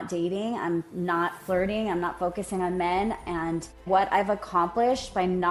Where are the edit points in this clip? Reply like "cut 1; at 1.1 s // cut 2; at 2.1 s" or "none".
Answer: cut 1; at 3.8 s